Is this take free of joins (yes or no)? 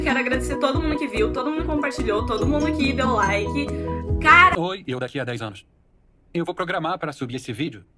no